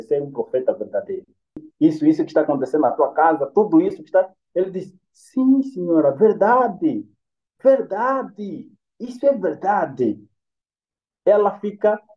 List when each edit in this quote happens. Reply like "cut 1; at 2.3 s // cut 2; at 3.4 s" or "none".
cut 1; at 1.6 s